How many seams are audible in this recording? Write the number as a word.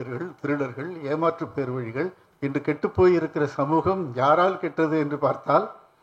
one